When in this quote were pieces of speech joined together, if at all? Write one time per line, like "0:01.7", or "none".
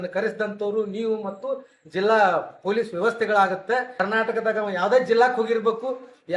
0:03.9